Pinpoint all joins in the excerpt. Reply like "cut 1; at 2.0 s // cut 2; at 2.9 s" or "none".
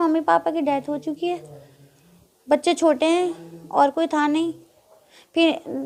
none